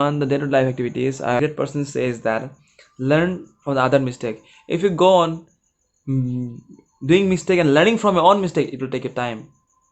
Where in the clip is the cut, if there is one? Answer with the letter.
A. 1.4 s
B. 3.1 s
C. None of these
A